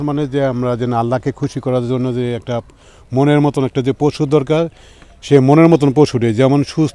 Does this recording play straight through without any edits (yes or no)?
yes